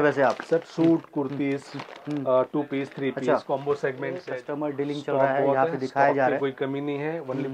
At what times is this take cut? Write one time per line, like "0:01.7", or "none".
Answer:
0:04.3